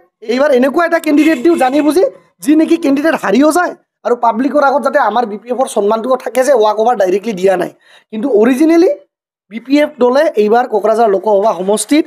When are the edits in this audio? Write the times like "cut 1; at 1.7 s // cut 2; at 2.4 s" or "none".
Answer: none

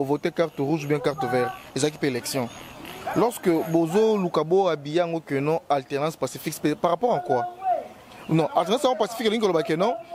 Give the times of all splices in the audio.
none

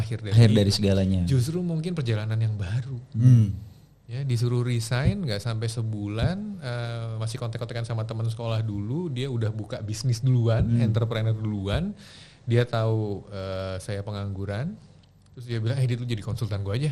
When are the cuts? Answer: none

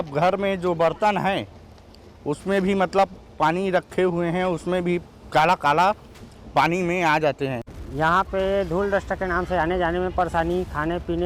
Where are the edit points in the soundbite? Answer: cut 1; at 7.8 s

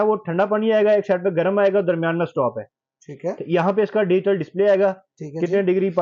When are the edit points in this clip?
none

